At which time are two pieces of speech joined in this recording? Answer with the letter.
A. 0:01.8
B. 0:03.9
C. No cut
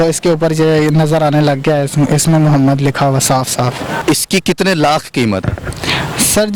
B